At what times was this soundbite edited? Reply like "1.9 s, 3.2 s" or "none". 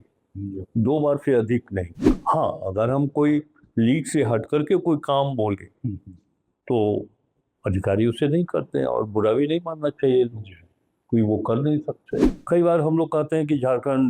2.0 s, 12.3 s